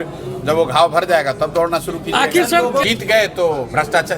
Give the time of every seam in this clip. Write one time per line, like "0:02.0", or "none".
0:02.8